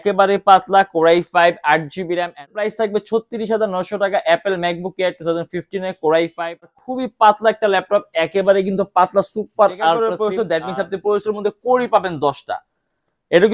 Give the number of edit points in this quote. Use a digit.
3